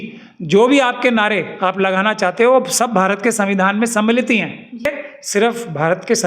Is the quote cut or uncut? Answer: cut